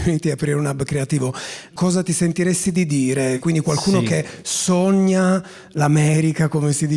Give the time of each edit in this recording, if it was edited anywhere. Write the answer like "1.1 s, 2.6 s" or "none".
1.7 s, 3.4 s